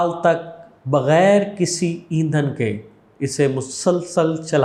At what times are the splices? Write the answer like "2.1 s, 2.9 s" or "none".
none